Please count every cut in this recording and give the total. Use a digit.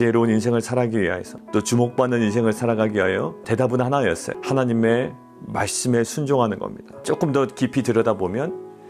4